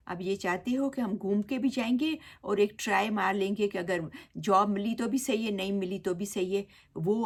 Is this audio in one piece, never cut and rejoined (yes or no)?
yes